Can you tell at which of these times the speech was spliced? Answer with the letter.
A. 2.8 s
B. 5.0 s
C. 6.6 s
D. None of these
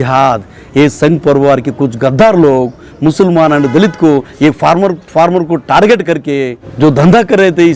C